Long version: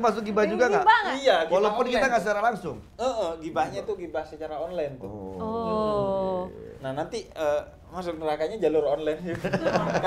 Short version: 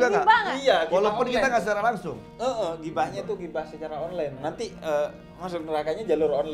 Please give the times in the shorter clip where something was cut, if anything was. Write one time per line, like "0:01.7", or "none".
0:04.4